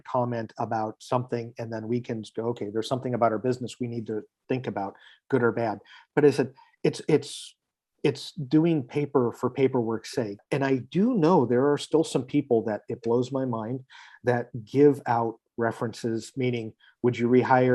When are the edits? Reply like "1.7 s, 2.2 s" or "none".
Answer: 10.4 s